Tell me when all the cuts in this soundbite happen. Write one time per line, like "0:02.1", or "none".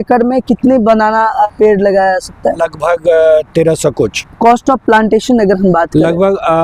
0:01.5
0:02.6
0:04.2